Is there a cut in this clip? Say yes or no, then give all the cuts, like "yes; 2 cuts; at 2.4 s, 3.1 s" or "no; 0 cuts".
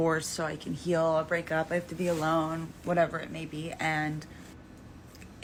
no; 0 cuts